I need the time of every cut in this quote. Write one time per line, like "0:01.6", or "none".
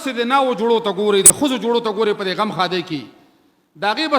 0:01.3